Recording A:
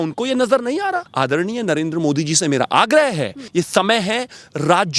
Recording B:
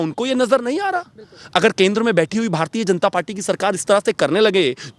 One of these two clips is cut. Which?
A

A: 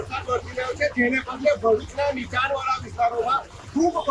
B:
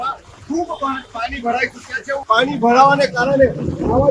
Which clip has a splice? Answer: B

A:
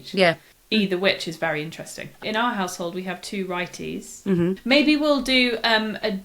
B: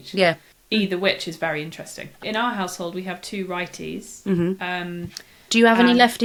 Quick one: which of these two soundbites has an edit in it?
A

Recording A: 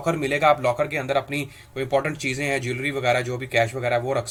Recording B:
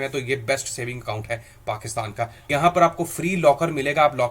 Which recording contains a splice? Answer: B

